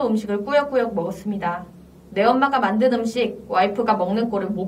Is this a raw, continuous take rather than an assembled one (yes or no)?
yes